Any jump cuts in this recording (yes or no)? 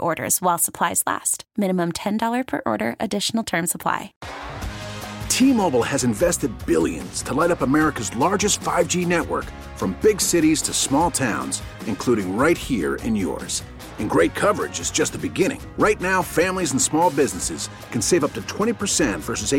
yes